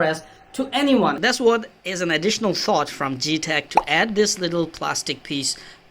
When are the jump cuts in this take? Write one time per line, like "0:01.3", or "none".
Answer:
0:01.2